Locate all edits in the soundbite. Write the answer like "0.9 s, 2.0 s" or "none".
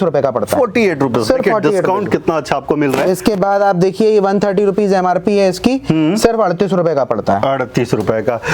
none